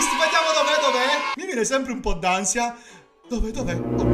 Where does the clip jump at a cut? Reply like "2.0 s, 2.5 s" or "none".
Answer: 1.3 s